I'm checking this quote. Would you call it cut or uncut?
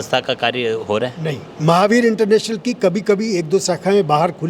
uncut